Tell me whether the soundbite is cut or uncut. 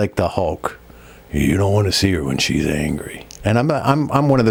uncut